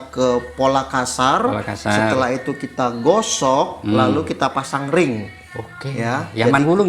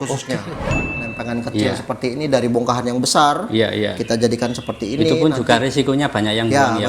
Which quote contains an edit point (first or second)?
second